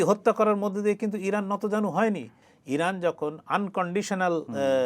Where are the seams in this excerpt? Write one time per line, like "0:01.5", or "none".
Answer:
0:02.4

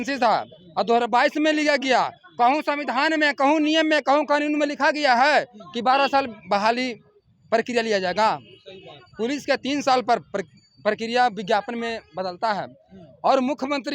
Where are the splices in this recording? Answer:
none

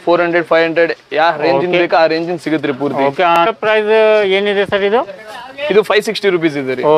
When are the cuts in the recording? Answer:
0:03.4

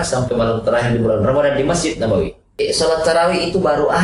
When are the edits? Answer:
0:02.6

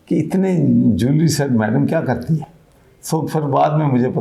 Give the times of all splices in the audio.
none

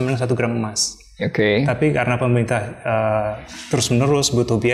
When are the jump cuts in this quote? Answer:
none

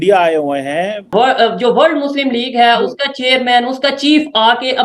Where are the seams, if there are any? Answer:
0:01.1

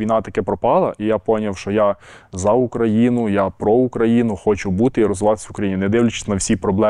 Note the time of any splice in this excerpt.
none

